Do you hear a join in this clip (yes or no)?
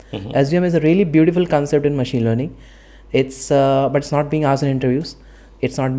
no